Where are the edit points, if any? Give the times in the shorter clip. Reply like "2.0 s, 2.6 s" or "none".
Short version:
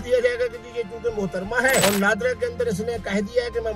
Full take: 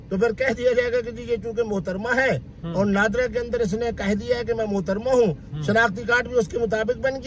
1.8 s